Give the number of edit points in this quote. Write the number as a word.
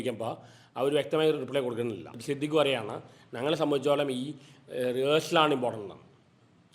one